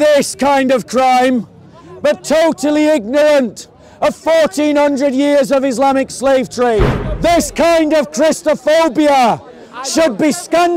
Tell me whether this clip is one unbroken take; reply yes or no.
no